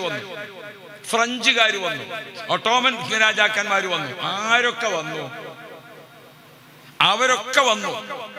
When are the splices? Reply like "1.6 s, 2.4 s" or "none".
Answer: none